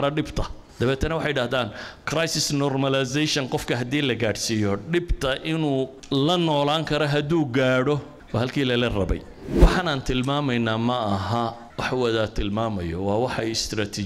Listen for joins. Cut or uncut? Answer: cut